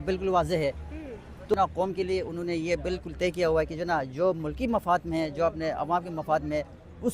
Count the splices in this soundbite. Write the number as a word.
one